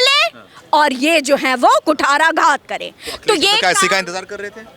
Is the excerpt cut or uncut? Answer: uncut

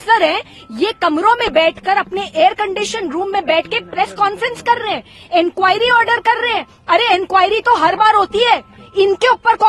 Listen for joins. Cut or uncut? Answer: uncut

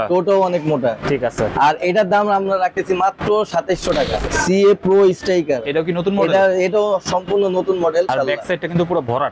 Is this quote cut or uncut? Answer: cut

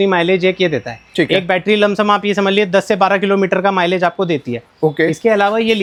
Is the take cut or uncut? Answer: uncut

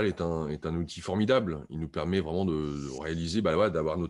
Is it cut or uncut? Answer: uncut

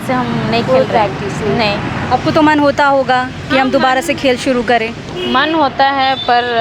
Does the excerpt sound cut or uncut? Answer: uncut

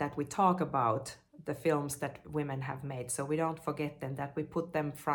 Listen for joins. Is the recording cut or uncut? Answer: uncut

